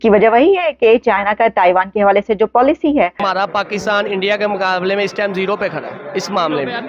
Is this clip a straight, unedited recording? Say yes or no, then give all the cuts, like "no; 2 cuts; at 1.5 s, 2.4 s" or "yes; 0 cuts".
no; 1 cut; at 3.2 s